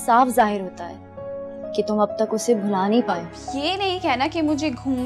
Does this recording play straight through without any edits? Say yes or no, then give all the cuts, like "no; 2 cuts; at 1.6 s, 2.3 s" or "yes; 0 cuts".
no; 1 cut; at 3.4 s